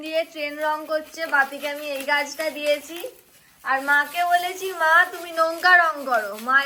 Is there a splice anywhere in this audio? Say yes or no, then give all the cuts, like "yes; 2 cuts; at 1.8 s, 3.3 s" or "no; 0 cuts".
no; 0 cuts